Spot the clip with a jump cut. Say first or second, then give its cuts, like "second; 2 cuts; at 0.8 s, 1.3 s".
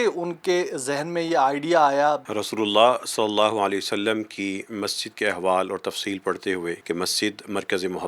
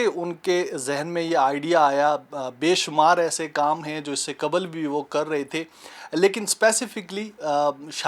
first; 2 cuts; at 2.3 s, 6.8 s